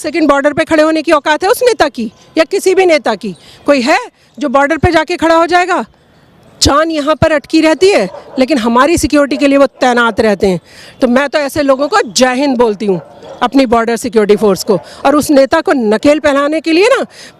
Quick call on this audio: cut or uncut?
uncut